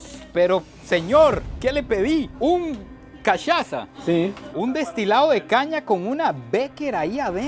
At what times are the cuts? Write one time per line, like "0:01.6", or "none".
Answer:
none